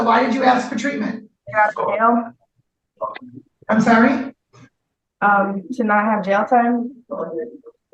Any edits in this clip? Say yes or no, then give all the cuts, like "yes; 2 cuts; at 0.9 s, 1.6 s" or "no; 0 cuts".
yes; 1 cut; at 1.4 s